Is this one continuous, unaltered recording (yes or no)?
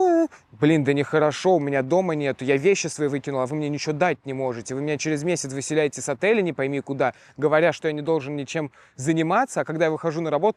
yes